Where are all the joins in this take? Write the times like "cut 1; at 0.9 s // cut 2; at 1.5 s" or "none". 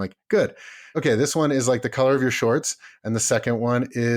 cut 1; at 0.9 s